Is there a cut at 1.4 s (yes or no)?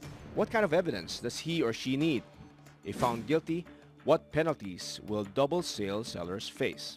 yes